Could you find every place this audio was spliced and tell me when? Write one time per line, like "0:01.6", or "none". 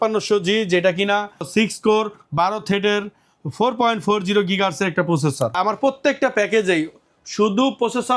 0:05.6